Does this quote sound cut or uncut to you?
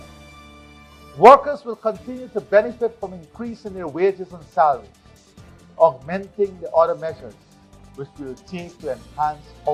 uncut